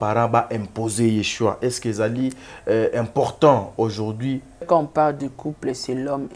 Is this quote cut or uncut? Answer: cut